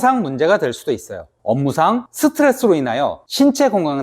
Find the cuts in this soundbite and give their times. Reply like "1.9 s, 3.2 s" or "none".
1.3 s